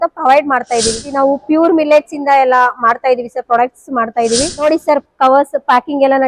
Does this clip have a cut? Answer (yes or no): yes